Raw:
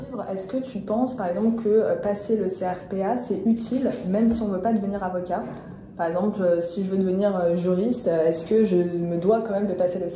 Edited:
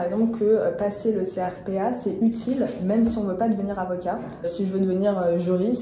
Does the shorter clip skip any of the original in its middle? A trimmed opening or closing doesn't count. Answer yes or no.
yes